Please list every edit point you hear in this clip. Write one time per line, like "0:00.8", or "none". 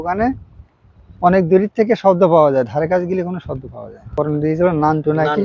0:04.1